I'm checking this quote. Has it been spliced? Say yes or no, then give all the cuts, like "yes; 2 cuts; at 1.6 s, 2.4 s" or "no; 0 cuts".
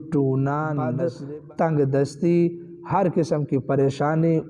yes; 1 cut; at 0.9 s